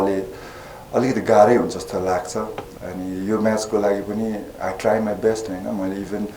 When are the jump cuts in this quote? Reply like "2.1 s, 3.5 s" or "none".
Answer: 2.7 s